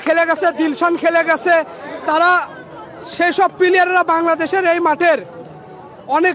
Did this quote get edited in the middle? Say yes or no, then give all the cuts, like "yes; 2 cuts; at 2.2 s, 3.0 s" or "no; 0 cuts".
no; 0 cuts